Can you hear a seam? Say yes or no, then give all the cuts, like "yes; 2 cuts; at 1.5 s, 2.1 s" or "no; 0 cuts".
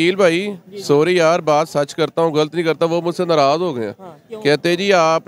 no; 0 cuts